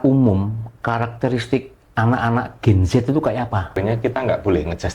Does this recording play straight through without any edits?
no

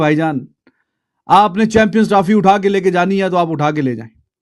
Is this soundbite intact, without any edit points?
yes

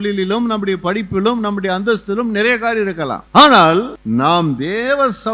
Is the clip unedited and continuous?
no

